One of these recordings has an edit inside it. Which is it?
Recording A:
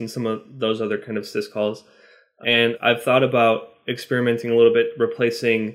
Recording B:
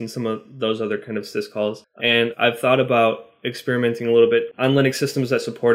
B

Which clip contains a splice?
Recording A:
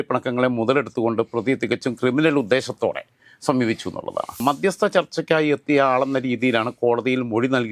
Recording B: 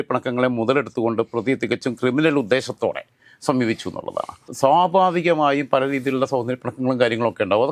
A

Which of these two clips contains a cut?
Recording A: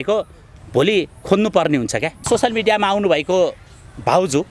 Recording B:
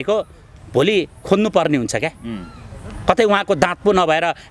A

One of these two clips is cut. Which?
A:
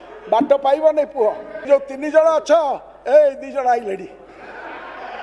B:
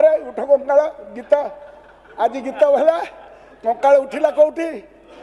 A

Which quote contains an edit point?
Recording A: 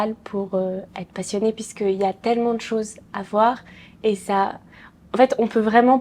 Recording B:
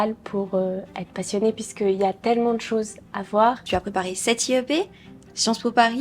B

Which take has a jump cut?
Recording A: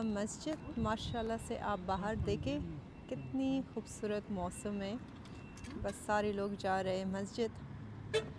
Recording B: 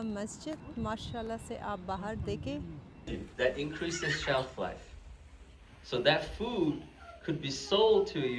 B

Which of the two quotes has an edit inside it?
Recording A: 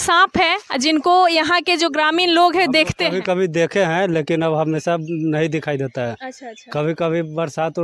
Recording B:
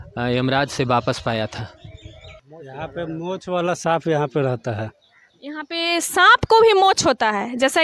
B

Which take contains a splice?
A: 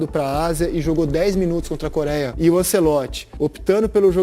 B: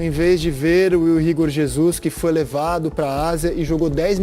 A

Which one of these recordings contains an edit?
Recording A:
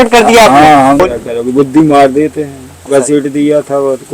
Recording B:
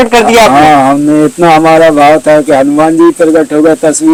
A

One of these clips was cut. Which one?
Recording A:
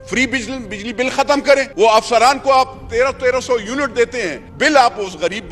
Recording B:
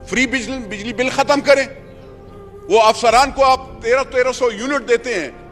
A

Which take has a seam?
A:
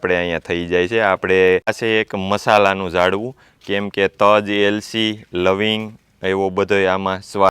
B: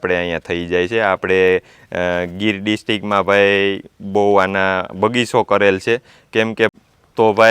A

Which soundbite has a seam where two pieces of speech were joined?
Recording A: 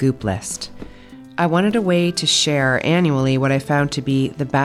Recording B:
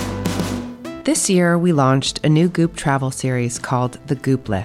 B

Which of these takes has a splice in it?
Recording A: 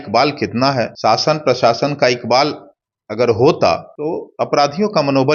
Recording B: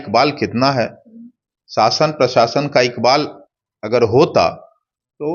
A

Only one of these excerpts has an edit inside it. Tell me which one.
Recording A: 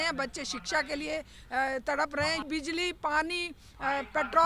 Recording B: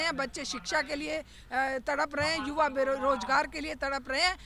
A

